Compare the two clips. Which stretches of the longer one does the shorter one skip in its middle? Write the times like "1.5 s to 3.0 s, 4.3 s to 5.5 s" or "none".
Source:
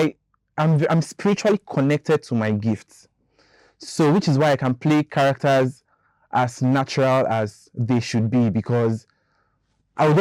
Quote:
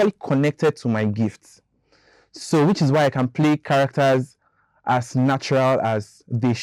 none